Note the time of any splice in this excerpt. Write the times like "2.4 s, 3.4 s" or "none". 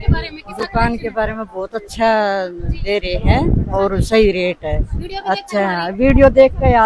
none